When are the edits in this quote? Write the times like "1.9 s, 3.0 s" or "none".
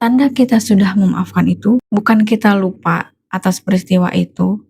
1.9 s